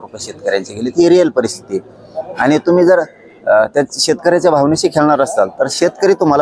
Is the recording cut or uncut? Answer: uncut